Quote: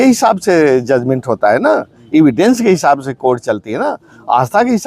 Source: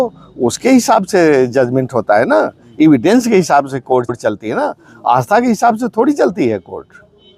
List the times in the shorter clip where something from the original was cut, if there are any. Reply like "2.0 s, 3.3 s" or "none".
3.4 s